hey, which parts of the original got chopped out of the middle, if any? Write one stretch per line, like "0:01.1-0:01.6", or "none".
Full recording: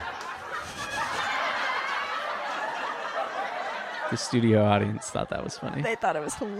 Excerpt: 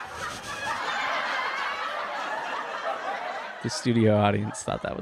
0:03.9-0:04.1